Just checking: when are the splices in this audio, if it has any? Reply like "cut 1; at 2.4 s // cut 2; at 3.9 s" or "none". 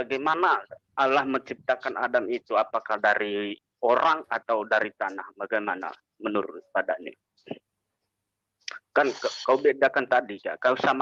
none